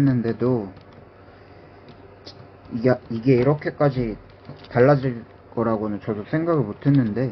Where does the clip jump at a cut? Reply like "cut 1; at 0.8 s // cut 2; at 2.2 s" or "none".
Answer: none